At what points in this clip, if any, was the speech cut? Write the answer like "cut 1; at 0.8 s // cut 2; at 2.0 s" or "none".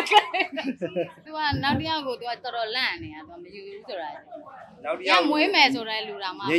cut 1; at 1.3 s